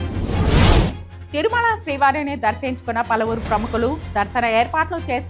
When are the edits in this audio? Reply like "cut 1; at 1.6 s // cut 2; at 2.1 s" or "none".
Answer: cut 1; at 1.1 s